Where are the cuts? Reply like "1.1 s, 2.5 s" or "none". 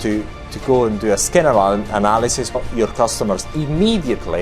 2.6 s